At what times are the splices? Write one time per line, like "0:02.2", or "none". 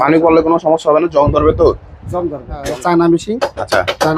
0:02.5